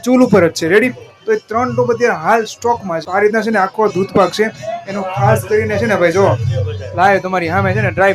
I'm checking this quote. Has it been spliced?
yes; 1 cut; at 3.0 s

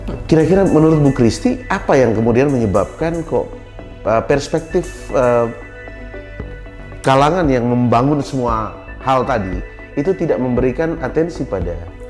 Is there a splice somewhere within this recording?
no; 0 cuts

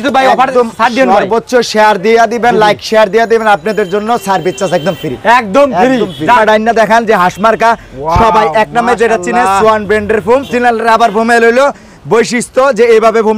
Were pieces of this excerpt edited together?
yes; 2 cuts; at 6.4 s, 10.5 s

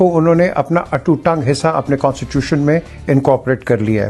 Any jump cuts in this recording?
no; 0 cuts

